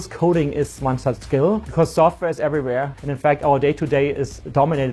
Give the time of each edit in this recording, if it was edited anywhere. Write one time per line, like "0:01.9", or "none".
0:01.6
0:03.0